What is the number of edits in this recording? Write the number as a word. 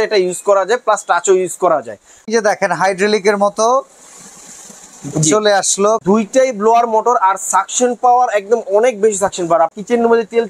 three